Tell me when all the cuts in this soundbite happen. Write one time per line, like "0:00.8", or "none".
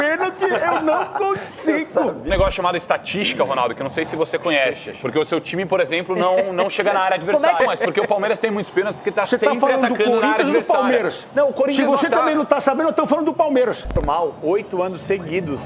0:02.3
0:07.6
0:13.9